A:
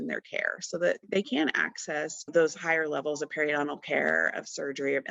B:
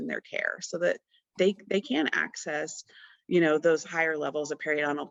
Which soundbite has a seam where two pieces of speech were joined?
A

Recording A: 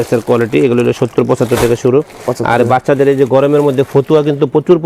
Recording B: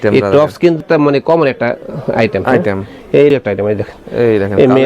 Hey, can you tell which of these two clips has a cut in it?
B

